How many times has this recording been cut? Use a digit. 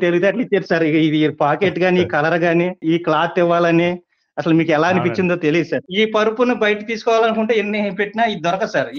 2